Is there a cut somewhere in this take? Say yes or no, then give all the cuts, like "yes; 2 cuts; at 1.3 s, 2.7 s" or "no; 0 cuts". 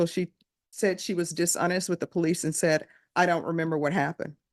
no; 0 cuts